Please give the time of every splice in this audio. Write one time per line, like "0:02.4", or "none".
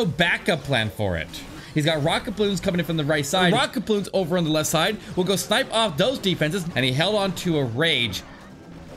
0:01.6
0:03.4
0:06.6

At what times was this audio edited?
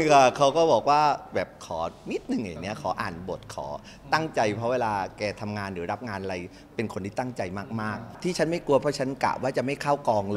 0:08.1

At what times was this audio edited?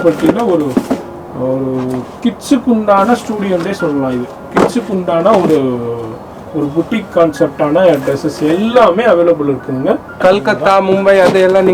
0:10.2

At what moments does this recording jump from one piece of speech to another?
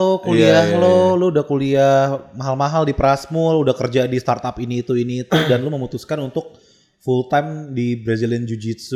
none

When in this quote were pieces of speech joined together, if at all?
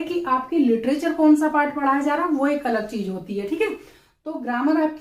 none

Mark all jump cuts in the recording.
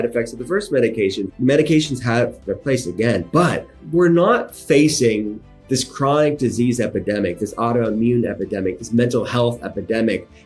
0:01.3
0:03.7

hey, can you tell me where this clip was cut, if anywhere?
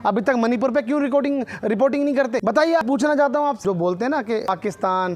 0:02.8
0:03.6
0:04.5

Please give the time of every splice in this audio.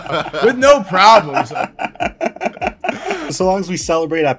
0:03.3

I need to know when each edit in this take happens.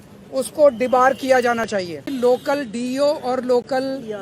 0:02.1

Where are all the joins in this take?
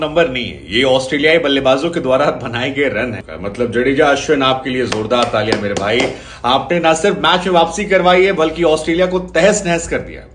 0:03.2

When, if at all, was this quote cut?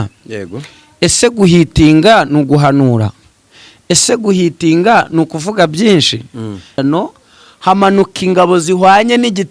0:06.8

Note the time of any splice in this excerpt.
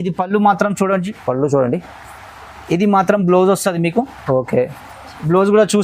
none

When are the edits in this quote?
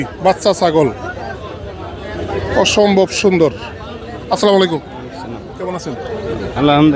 none

